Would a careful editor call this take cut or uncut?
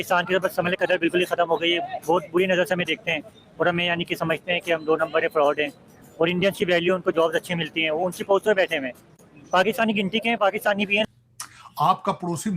cut